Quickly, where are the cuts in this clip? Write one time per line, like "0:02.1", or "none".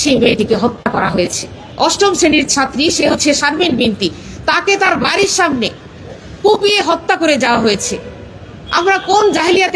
0:01.6